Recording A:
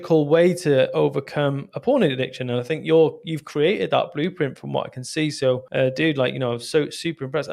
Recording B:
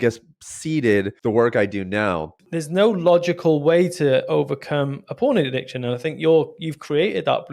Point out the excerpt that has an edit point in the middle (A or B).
B